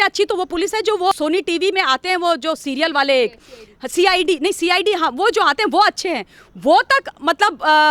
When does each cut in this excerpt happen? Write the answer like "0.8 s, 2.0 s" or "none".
1.1 s